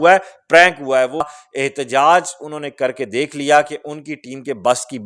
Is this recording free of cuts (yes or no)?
no